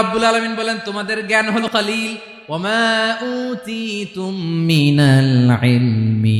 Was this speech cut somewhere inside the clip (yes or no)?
yes